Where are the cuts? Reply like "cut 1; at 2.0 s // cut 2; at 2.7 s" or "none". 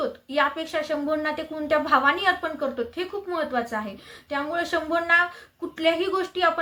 none